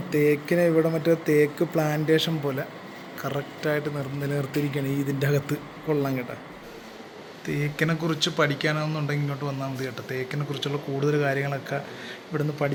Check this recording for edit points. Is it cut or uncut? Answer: uncut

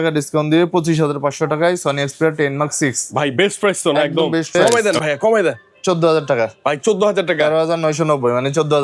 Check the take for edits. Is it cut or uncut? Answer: cut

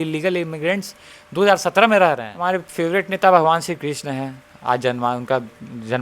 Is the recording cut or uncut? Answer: cut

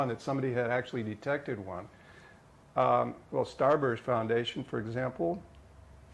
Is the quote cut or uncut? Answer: uncut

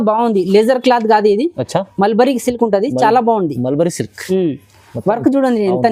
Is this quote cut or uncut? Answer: uncut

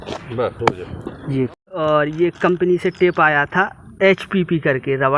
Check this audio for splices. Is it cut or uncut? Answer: cut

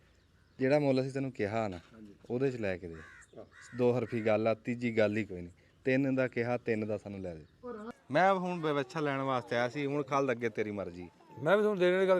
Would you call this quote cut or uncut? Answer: cut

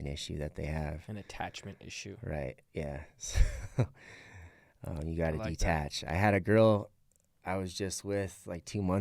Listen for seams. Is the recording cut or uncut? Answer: uncut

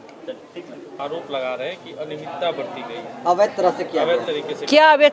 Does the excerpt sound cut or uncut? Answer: cut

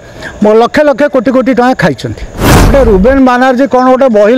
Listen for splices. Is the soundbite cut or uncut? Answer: cut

